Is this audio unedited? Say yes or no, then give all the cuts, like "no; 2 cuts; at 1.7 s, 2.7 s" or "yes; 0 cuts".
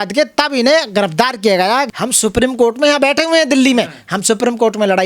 no; 1 cut; at 1.9 s